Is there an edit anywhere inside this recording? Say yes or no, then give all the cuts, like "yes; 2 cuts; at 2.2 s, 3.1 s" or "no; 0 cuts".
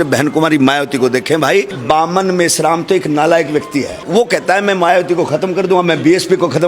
yes; 2 cuts; at 1.7 s, 4.0 s